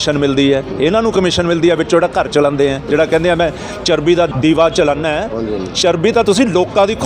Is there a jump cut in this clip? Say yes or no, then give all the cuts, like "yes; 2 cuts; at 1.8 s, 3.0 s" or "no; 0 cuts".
yes; 1 cut; at 4.3 s